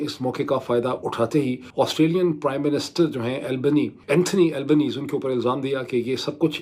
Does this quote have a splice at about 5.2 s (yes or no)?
no